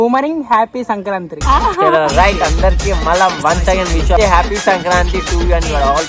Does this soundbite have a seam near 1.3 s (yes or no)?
yes